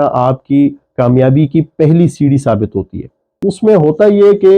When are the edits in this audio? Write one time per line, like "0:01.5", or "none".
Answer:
0:03.4